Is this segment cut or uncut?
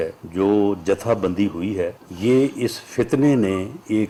uncut